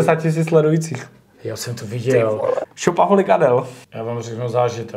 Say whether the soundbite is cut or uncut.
cut